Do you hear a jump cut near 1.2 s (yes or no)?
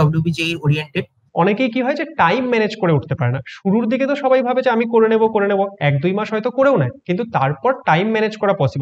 yes